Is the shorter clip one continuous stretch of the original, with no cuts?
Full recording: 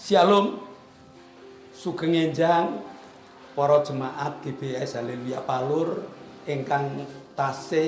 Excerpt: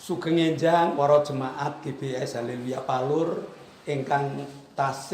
no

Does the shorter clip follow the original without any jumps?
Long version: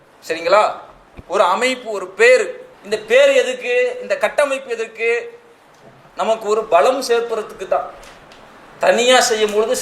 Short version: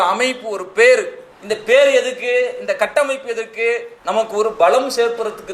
no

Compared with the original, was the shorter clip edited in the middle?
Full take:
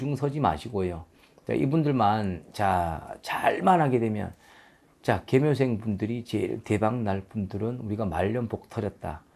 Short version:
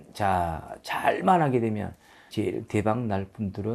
yes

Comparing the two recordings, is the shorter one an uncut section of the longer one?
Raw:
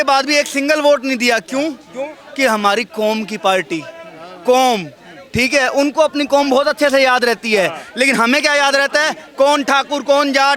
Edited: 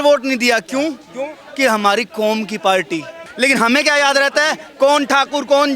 no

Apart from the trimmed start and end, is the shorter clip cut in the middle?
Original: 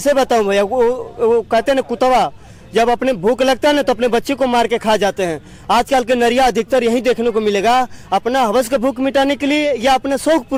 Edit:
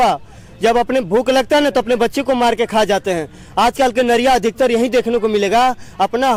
no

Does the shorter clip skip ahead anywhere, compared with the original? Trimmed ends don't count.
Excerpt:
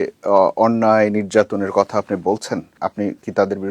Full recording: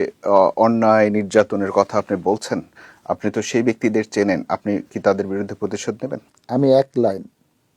yes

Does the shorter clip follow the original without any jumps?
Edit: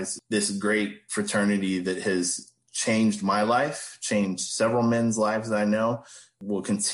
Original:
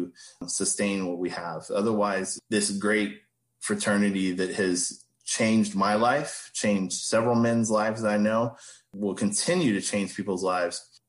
no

